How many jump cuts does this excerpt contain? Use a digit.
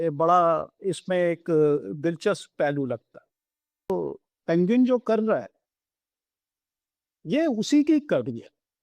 1